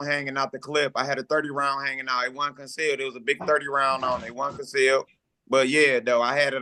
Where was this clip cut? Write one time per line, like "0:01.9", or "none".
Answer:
none